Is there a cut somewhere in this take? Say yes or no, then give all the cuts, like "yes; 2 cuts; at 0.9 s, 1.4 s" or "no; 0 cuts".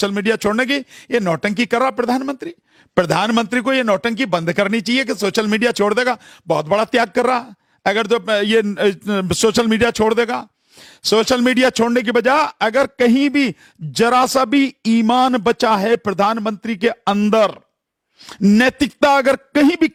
no; 0 cuts